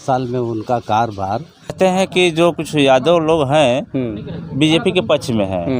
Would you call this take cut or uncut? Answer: cut